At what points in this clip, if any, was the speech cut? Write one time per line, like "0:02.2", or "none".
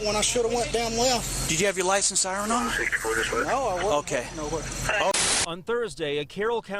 0:05.1